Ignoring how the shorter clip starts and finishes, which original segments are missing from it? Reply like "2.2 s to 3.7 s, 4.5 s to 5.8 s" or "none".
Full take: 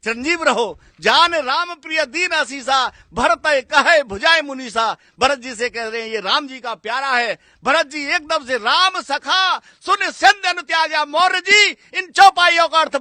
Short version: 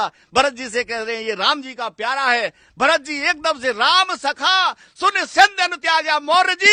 none